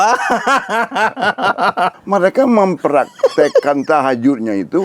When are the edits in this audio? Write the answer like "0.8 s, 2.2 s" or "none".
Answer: 1.9 s